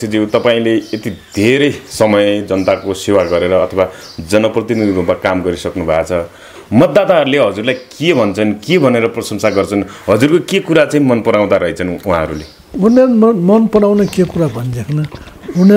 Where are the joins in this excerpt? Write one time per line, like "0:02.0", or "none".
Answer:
none